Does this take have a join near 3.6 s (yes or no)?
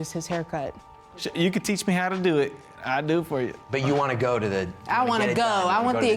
yes